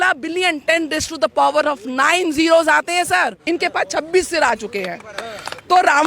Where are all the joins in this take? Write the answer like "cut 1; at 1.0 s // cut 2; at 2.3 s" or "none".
cut 1; at 3.4 s